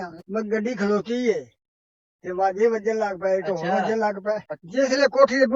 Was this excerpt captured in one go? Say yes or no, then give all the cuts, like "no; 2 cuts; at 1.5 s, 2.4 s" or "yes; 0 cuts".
no; 1 cut; at 4.5 s